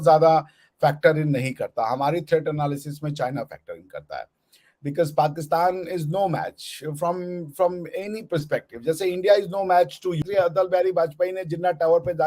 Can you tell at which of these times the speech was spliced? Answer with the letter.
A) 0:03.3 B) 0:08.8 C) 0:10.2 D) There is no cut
C